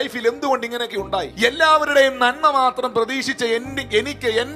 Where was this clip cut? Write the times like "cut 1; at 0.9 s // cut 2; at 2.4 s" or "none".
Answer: cut 1; at 1.3 s